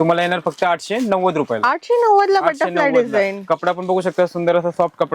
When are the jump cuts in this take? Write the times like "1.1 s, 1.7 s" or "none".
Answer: none